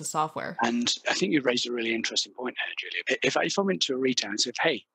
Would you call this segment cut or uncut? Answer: cut